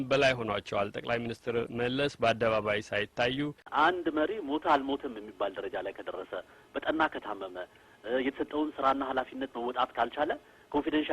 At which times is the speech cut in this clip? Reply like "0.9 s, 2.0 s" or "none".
3.7 s